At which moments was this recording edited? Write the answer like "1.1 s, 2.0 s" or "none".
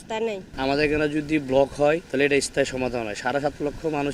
2.1 s